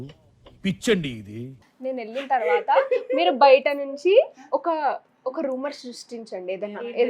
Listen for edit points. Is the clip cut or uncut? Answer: cut